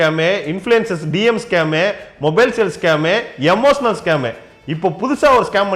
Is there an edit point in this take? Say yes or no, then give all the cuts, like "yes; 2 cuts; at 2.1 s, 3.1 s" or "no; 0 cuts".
no; 0 cuts